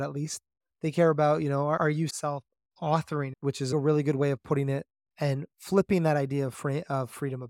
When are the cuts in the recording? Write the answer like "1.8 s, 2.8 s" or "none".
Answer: 1.9 s, 3.7 s